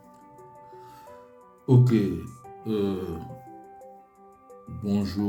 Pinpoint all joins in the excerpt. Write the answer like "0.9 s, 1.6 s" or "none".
none